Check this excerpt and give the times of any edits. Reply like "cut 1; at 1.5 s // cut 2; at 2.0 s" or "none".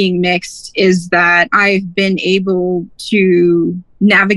cut 1; at 1.5 s // cut 2; at 2.9 s